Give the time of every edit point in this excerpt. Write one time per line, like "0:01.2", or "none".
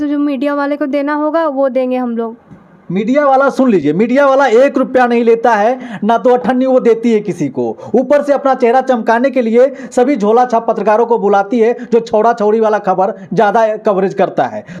none